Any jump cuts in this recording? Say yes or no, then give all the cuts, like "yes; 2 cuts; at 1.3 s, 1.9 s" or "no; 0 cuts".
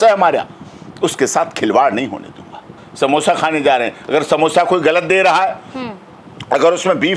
no; 0 cuts